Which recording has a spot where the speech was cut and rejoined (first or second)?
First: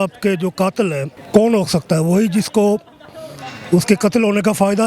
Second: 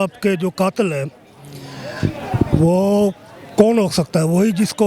first